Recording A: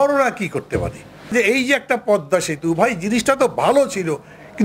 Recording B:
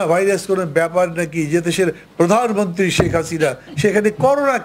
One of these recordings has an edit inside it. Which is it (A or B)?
A